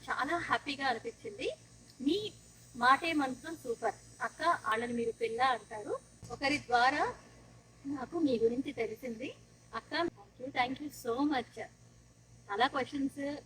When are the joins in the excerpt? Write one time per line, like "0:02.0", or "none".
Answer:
0:04.7
0:10.1